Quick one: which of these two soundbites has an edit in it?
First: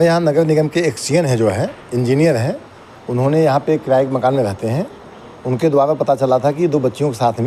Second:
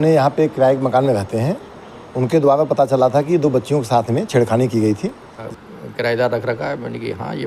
second; 1 cut; at 5.5 s

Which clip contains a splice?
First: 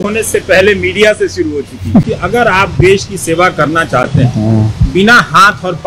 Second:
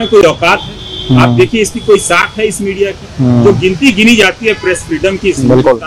first; 1 cut; at 2.0 s

